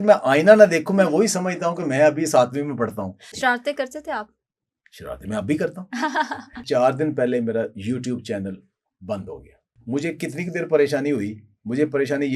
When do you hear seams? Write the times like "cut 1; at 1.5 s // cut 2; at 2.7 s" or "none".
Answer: cut 1; at 3.3 s // cut 2; at 6.6 s // cut 3; at 9.7 s